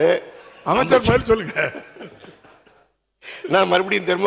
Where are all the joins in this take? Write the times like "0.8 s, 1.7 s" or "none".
none